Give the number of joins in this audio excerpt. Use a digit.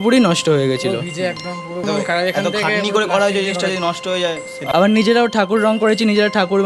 2